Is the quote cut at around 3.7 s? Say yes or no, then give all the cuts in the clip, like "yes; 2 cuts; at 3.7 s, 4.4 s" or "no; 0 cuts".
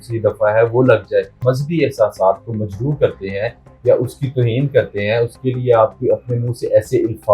no; 1 cut; at 1.4 s